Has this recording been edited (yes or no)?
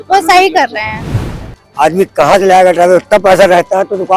yes